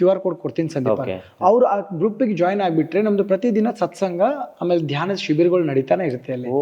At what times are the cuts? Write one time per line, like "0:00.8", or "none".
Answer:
none